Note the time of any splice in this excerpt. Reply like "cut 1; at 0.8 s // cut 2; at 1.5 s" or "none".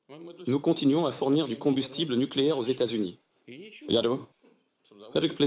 none